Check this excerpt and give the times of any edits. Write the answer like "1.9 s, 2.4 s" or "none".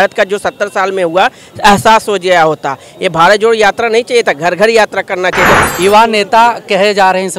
5.6 s